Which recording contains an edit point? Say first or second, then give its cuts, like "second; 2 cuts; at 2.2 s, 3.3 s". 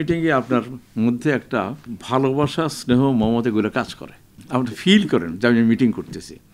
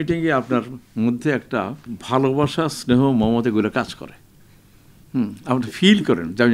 first; 1 cut; at 4.4 s